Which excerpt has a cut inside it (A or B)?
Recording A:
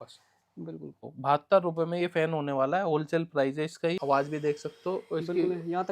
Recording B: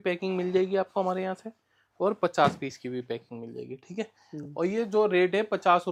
A